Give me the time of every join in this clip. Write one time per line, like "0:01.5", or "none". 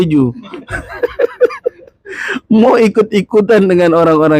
none